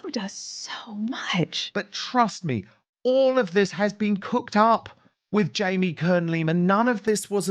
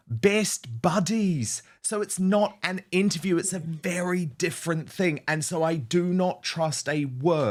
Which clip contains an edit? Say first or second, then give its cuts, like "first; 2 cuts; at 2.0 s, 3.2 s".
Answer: first; 1 cut; at 1.6 s